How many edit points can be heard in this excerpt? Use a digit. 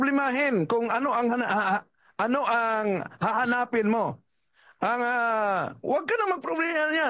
0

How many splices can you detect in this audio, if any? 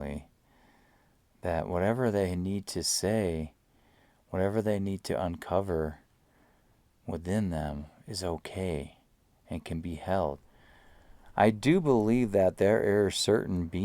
1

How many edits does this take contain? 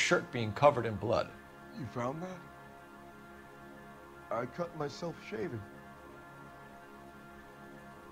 0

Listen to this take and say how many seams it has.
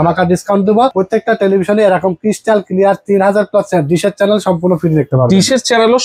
1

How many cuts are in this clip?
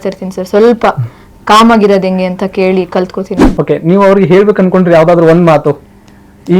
1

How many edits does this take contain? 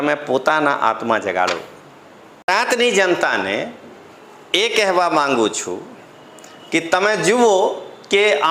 1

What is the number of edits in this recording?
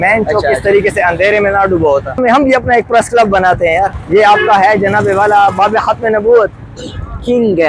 2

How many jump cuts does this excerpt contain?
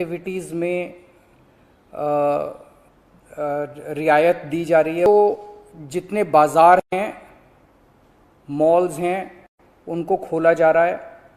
1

